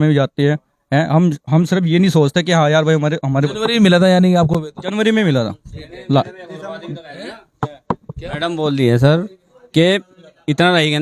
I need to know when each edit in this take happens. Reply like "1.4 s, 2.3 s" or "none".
none